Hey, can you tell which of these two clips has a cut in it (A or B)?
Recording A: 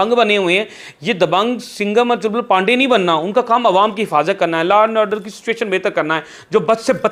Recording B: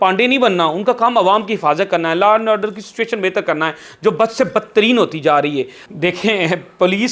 B